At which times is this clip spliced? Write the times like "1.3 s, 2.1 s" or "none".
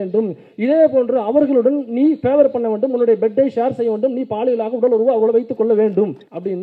none